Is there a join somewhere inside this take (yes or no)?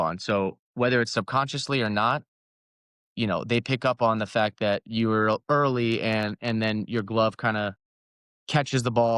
no